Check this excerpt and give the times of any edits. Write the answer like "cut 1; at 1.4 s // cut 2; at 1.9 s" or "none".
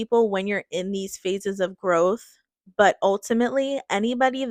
none